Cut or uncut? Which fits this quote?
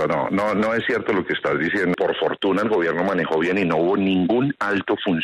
cut